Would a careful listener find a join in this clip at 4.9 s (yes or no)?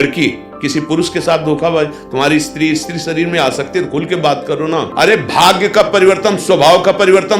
yes